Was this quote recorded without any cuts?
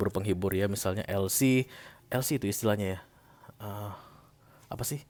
yes; 0 cuts

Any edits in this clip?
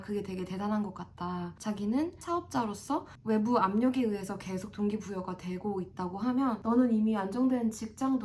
no; 0 cuts

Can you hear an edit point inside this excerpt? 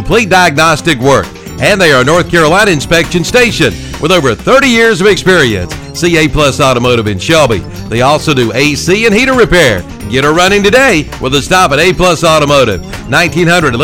no; 0 cuts

